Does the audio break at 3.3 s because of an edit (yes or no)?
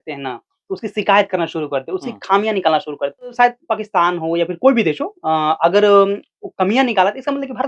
yes